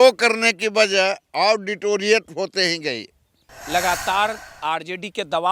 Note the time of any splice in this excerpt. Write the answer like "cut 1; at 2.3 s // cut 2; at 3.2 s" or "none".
cut 1; at 3.5 s